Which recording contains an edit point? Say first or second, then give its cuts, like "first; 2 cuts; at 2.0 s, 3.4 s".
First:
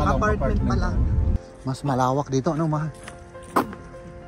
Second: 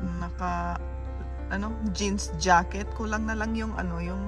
first; 1 cut; at 1.4 s